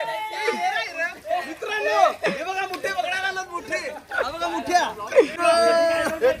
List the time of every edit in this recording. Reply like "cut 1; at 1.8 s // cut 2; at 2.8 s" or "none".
cut 1; at 5.4 s